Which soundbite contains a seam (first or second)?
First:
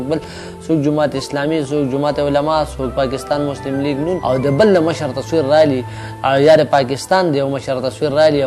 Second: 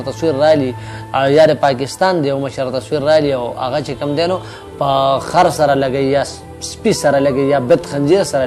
first